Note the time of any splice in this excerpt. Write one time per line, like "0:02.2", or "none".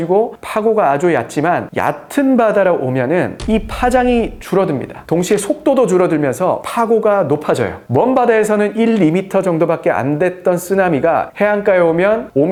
none